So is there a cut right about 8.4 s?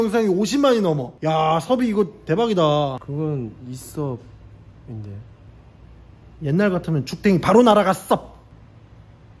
yes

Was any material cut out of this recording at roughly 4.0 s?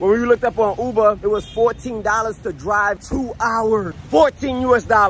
yes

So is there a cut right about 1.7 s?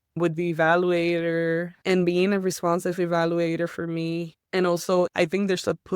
no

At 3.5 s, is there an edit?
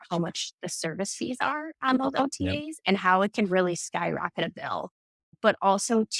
no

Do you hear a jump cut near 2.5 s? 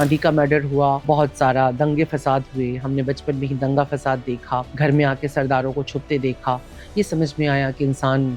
no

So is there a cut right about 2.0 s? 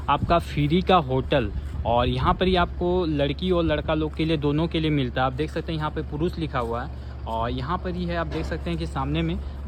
no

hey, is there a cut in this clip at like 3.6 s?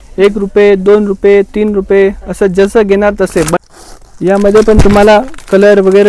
yes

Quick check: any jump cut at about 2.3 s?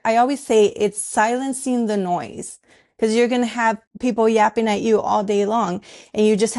no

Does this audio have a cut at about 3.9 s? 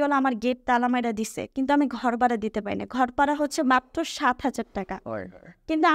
no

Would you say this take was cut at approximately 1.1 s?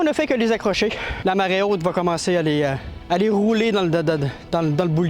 yes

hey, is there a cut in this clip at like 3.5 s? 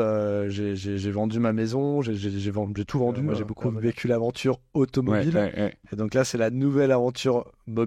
yes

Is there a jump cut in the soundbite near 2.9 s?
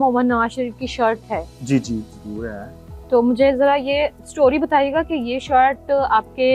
no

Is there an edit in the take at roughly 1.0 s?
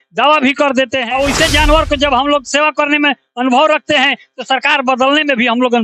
yes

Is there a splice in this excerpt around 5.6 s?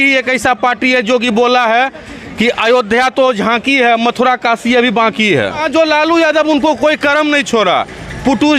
yes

